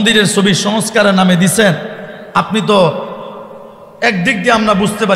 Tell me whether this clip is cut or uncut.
uncut